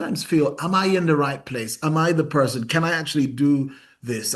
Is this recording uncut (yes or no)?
yes